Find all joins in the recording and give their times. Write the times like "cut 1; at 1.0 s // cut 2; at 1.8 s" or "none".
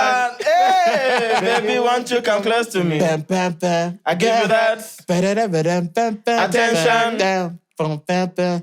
none